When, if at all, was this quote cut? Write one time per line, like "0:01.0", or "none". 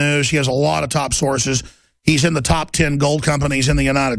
0:01.1